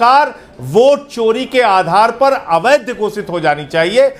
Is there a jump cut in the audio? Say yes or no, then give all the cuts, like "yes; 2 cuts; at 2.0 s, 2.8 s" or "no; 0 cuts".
no; 0 cuts